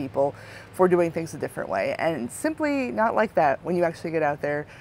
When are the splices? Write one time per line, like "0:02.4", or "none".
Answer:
none